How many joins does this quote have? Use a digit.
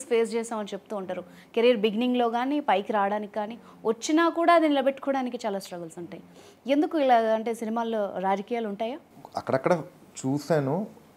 1